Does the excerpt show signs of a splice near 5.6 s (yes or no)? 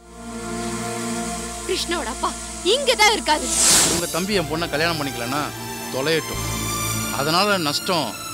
no